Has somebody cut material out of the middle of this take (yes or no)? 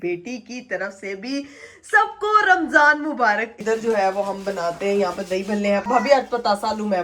yes